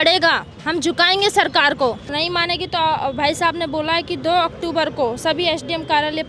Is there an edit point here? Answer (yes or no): yes